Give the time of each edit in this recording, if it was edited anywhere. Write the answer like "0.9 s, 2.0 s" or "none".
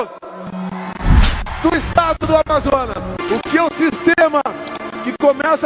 3.2 s